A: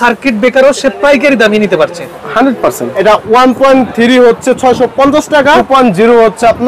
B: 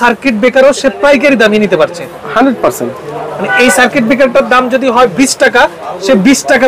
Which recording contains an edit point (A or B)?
A